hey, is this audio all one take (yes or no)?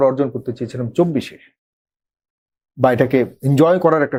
yes